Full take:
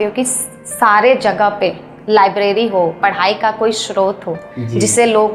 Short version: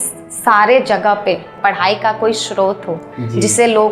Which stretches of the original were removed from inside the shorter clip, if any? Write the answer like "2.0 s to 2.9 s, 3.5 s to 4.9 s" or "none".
1.9 s to 2.9 s